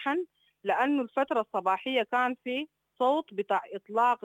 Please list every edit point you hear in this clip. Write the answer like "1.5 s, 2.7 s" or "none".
none